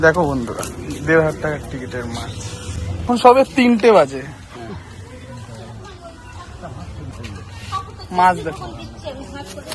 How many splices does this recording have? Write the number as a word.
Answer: two